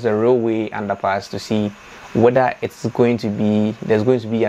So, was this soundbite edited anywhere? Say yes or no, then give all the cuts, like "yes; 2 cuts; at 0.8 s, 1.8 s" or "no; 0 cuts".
no; 0 cuts